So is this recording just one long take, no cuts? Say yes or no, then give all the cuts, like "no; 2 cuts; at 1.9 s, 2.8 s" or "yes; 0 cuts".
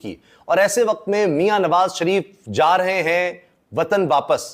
yes; 0 cuts